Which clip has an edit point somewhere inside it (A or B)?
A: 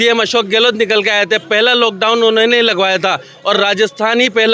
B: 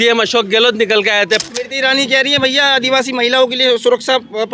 B